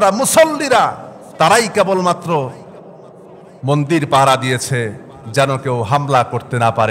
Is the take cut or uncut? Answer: uncut